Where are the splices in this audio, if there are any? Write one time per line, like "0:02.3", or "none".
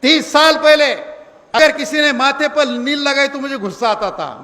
0:01.6